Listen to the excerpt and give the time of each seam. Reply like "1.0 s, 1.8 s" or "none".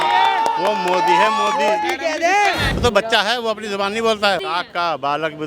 2.7 s, 4.4 s